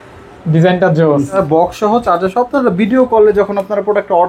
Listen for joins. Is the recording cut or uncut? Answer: cut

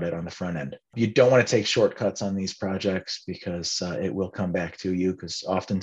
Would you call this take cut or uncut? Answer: cut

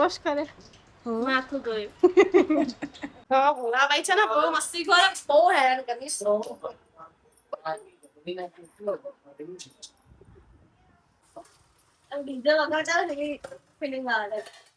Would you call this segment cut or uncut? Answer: cut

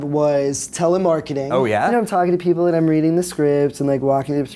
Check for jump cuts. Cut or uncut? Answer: cut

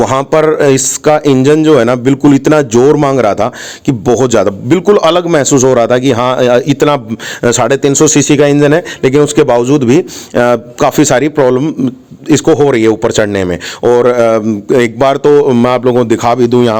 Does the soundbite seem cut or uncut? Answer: uncut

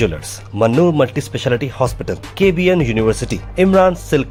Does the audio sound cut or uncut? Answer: uncut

